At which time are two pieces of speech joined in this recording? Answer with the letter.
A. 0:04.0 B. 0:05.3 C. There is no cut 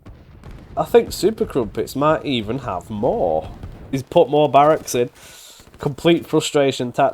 A